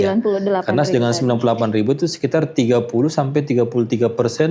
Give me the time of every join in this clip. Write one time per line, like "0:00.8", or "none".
none